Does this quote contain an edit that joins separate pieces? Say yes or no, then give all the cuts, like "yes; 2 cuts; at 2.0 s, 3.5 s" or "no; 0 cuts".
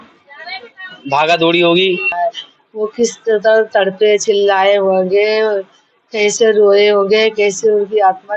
yes; 1 cut; at 2.2 s